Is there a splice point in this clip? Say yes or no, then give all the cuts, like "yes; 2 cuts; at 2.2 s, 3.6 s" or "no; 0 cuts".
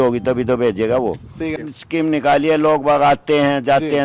yes; 1 cut; at 1.6 s